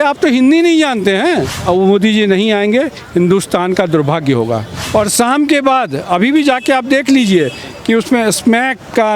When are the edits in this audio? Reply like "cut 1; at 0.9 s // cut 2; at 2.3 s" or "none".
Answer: cut 1; at 1.5 s // cut 2; at 4.8 s